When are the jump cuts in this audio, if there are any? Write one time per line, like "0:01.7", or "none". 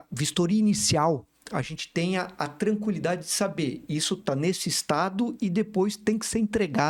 none